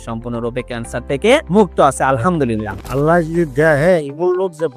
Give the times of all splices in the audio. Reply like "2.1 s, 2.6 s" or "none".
2.8 s

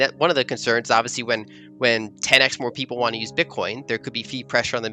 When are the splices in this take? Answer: none

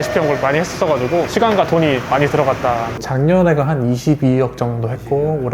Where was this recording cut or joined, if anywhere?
3.0 s

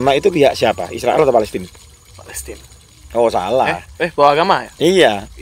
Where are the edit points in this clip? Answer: none

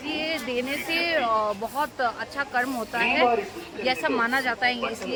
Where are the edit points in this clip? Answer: none

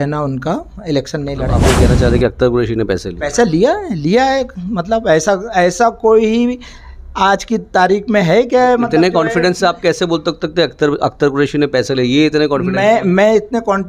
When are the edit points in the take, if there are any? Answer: 1.5 s

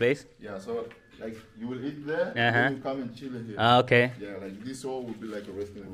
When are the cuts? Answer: none

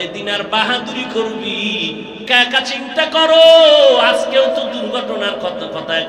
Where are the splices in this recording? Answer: 2.3 s

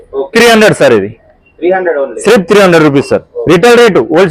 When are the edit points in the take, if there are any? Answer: none

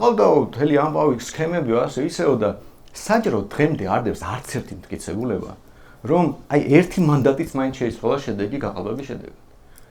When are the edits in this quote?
none

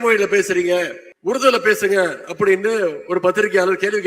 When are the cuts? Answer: 1.0 s

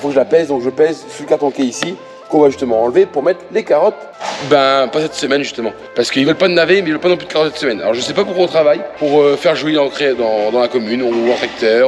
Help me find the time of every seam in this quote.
none

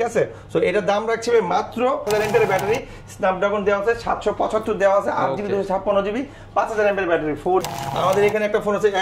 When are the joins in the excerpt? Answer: 2.0 s, 7.7 s

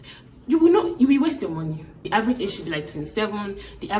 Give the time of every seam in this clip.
2.0 s

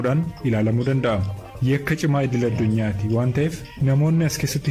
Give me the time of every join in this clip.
3.7 s

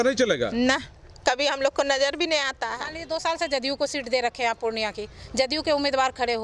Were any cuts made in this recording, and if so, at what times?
2.9 s

